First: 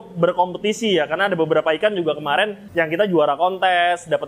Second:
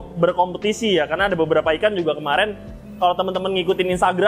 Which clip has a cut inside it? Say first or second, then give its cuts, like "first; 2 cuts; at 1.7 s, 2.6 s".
first; 1 cut; at 2.6 s